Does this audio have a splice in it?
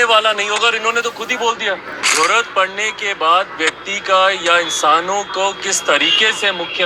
yes; 1 cut; at 2.0 s

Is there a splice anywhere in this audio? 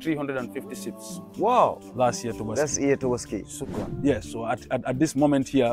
yes; 1 cut; at 3.5 s

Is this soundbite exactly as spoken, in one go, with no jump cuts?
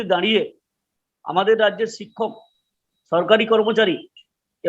yes; 0 cuts

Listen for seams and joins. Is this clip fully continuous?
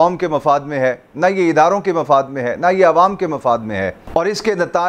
yes; 0 cuts

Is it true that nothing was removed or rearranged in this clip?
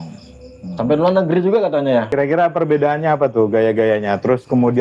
no; 1 cut; at 2.1 s

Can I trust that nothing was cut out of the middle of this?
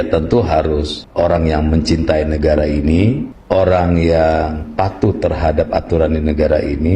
no; 2 cuts; at 1.0 s, 3.3 s

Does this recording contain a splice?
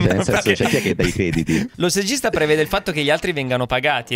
yes; 1 cut; at 1.7 s

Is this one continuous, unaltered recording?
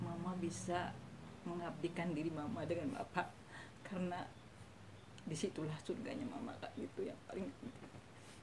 yes; 0 cuts

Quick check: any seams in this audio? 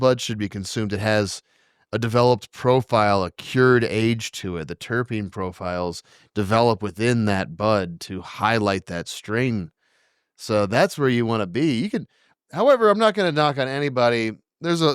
no; 0 cuts

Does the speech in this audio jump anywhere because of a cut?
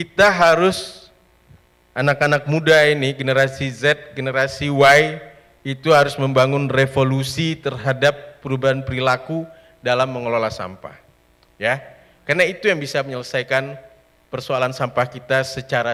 no; 0 cuts

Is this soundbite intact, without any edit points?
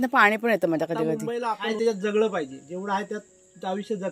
no; 1 cut; at 1.7 s

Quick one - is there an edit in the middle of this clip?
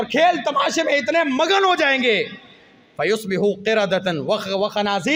no; 0 cuts

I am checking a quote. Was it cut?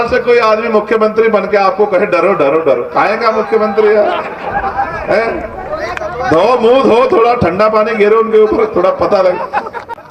no; 0 cuts

